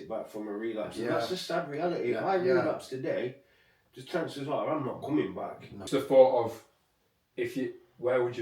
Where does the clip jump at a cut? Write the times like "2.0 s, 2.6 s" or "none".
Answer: 5.8 s